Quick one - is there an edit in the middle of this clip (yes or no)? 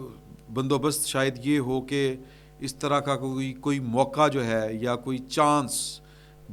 no